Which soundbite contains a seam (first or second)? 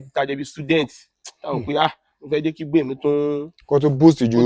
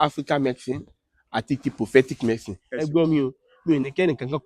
second